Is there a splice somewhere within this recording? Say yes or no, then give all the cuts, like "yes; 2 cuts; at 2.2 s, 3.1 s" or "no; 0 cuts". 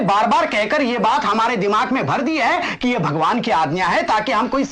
no; 0 cuts